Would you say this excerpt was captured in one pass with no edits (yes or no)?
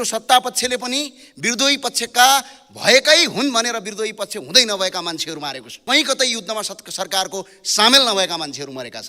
no